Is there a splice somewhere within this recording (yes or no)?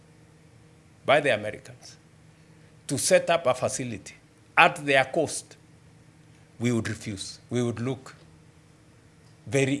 yes